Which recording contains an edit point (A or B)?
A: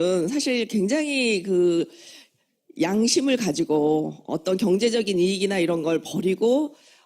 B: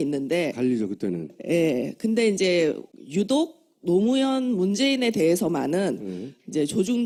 A